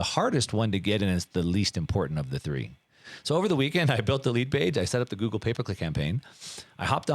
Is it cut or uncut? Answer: cut